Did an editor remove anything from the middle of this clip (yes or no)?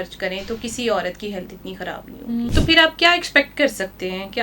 yes